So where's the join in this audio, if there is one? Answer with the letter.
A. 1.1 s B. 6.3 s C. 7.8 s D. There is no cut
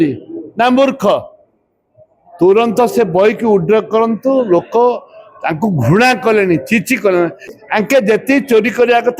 C